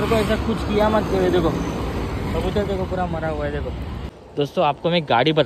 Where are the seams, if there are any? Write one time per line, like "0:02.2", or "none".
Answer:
0:04.1